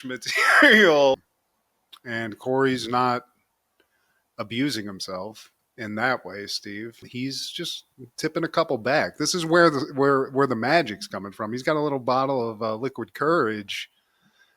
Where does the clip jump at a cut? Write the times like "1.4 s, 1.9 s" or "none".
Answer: 1.2 s